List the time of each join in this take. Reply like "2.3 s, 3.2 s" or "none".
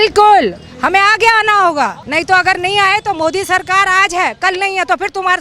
2.0 s

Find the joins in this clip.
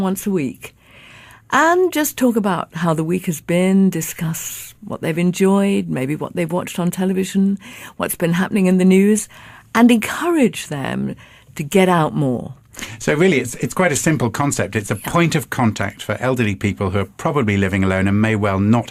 none

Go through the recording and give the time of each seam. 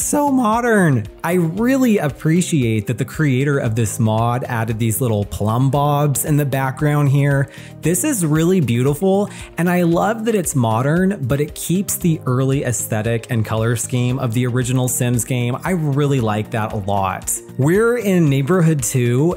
none

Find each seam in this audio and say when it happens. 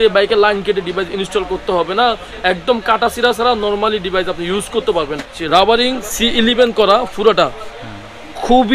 5.4 s

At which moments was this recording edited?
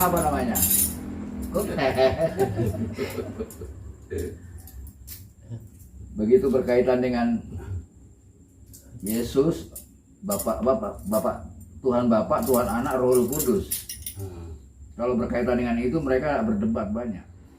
1.5 s

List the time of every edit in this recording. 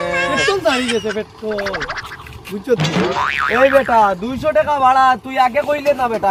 none

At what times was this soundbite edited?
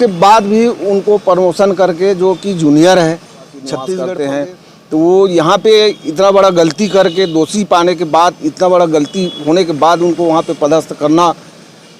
3.9 s

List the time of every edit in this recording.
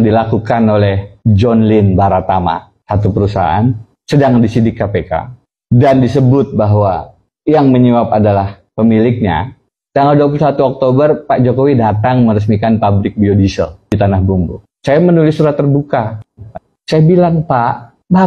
16.5 s

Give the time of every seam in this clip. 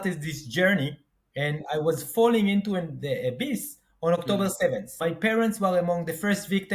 4.9 s

